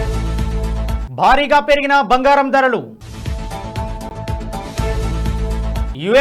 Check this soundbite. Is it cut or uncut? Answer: cut